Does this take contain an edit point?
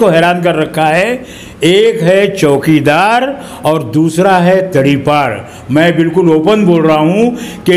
no; 0 cuts

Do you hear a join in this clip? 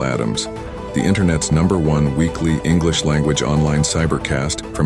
no; 0 cuts

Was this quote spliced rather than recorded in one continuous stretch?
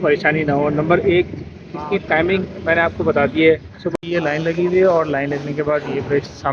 yes; 1 cut; at 3.9 s

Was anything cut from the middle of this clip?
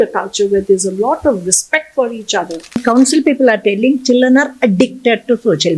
yes; 1 cut; at 2.8 s

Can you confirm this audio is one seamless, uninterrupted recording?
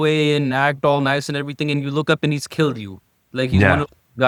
yes; 0 cuts

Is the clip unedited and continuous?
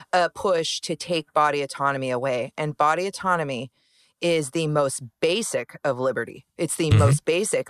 yes; 0 cuts

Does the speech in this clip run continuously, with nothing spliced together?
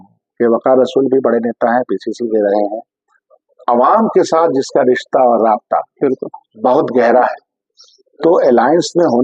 yes; 0 cuts

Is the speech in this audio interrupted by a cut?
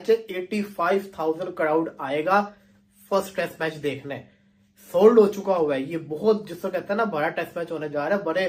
no; 0 cuts

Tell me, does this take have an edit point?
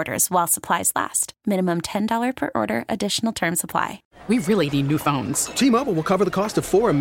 yes; 1 cut; at 4.1 s

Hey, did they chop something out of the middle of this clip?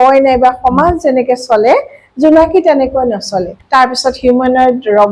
yes; 1 cut; at 3.6 s

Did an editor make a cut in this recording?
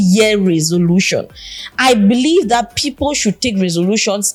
no; 0 cuts

